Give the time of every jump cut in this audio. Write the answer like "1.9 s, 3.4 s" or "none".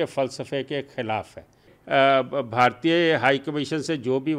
1.7 s